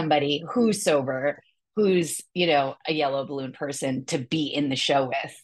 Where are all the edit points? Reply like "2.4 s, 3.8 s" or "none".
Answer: none